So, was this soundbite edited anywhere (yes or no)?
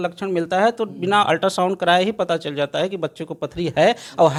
no